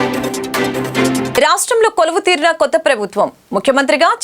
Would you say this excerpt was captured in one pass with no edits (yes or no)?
no